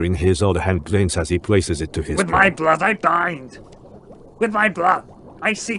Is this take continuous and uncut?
no; 1 cut; at 2.1 s

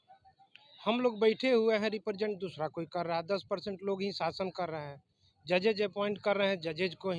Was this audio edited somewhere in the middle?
no; 0 cuts

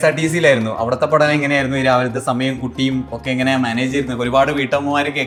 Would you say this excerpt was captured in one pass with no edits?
yes; 0 cuts

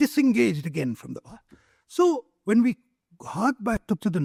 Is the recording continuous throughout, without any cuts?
yes; 0 cuts

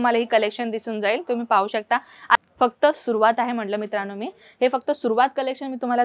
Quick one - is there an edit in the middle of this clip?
yes; 1 cut; at 2.3 s

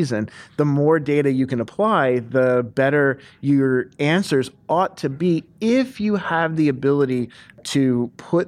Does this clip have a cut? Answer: yes; 1 cut; at 7.6 s

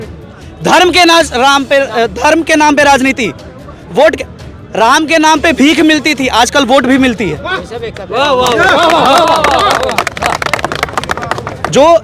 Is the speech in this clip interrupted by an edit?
no; 0 cuts

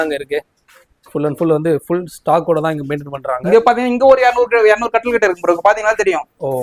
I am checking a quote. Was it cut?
no; 0 cuts

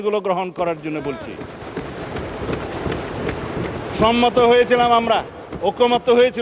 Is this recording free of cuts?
yes; 0 cuts

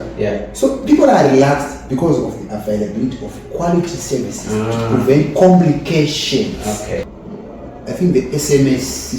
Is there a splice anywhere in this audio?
yes; 1 cut; at 7.1 s

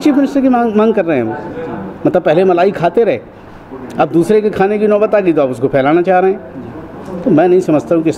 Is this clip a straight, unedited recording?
yes; 0 cuts

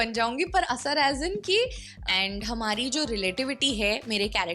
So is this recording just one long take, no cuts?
no; 1 cut; at 1.9 s

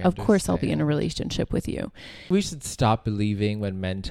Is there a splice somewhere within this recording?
yes; 1 cut; at 2.3 s

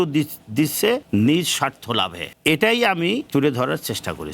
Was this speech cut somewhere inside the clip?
yes; 3 cuts; at 1.0 s, 2.2 s, 3.3 s

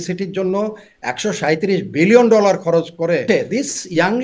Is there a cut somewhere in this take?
yes; 1 cut; at 3.2 s

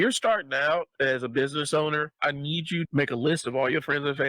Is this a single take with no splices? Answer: no; 1 cut; at 2.9 s

